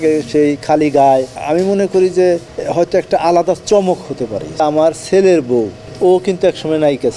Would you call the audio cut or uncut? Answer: cut